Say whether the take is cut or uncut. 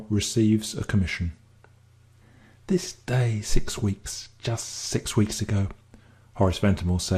uncut